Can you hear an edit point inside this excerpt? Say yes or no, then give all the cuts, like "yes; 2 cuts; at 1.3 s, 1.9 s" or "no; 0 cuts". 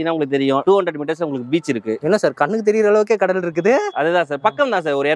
no; 0 cuts